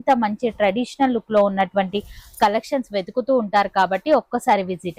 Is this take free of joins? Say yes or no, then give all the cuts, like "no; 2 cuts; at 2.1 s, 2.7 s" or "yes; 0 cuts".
yes; 0 cuts